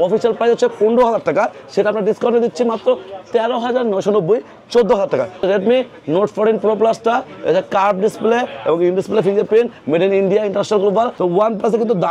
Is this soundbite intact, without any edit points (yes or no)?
no